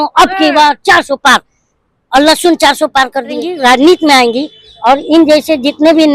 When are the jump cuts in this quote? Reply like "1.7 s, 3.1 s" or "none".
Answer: 3.5 s